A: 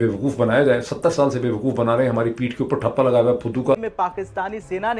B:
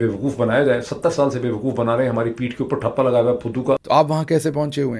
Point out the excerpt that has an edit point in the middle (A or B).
A